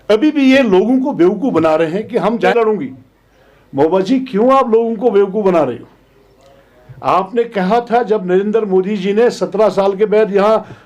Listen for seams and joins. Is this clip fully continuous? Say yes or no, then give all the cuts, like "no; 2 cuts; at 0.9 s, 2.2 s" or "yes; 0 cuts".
no; 1 cut; at 2.5 s